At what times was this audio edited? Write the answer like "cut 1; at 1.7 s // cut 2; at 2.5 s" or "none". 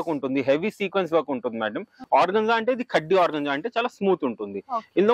cut 1; at 1.9 s